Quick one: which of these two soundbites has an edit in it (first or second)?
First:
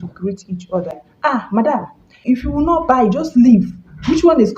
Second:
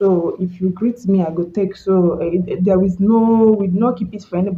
first